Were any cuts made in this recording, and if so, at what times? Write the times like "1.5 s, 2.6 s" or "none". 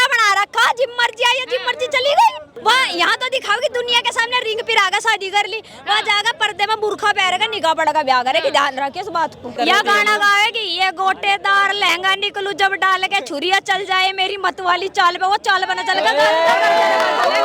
2.5 s, 9.5 s